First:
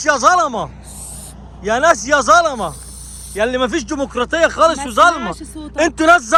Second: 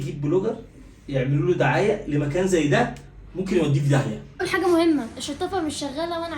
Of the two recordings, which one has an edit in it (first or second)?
second